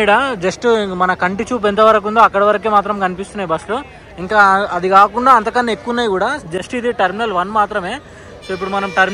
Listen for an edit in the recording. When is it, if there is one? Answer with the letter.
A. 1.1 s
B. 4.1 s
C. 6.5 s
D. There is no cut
D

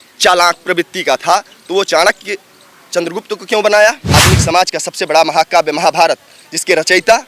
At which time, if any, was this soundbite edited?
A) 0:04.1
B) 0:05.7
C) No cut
A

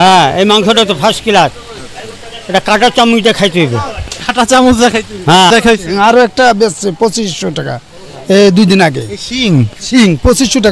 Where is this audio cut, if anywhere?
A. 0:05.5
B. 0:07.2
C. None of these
A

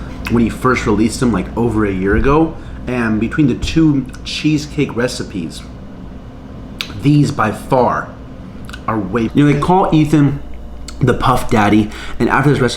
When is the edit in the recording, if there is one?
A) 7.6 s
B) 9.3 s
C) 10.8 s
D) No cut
B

